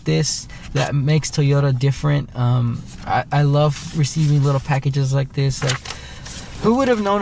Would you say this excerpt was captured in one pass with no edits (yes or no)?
yes